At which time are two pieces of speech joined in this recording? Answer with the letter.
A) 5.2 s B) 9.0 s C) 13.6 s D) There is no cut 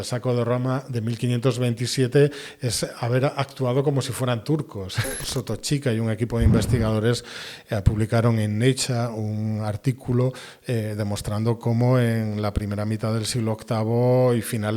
A